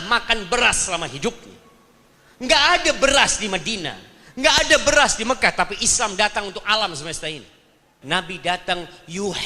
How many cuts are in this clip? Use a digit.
1